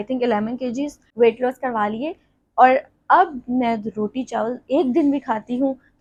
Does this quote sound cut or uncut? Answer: uncut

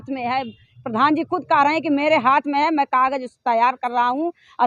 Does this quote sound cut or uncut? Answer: uncut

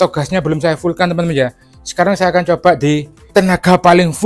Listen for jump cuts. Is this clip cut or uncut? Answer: cut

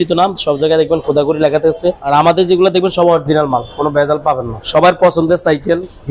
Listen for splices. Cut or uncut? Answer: cut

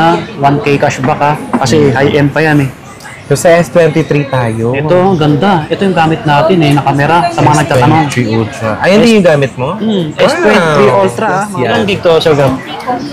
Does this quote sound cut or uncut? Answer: cut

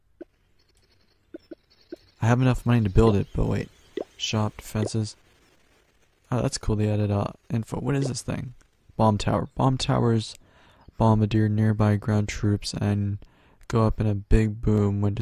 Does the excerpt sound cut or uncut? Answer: uncut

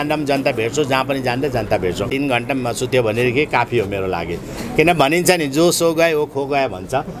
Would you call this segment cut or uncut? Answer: cut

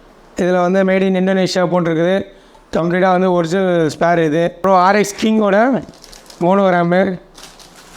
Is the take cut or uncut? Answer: cut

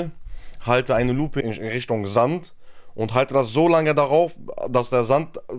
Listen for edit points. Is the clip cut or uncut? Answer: cut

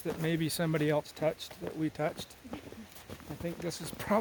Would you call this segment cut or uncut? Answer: uncut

